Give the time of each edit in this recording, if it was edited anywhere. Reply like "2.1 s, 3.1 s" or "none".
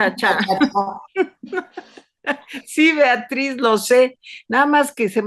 none